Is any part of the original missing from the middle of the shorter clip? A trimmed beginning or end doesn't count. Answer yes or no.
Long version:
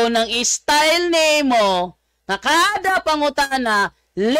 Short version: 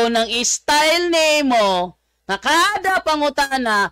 no